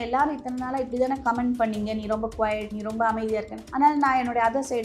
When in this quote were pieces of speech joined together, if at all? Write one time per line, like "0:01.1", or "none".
0:02.7
0:03.6